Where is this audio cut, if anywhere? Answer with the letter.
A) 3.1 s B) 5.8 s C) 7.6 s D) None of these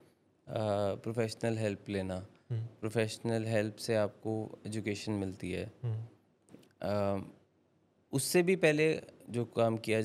D